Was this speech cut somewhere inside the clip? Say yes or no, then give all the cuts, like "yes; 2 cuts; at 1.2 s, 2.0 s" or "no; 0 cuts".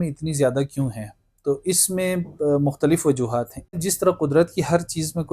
yes; 1 cut; at 3.7 s